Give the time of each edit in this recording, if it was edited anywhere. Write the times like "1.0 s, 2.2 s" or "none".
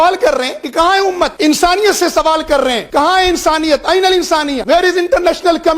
1.0 s, 2.8 s, 4.6 s